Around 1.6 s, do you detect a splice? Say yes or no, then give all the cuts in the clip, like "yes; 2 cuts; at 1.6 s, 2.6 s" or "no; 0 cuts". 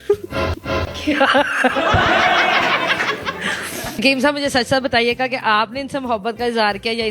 no; 1 cut; at 3.9 s